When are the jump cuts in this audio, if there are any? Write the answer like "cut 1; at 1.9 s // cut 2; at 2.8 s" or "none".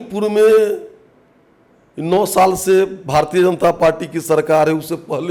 none